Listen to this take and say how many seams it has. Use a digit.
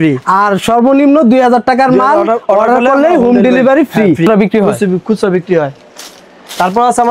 1